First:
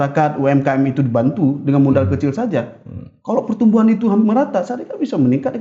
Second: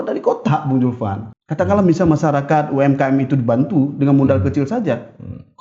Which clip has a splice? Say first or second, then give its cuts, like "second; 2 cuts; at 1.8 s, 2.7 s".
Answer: second; 1 cut; at 1.2 s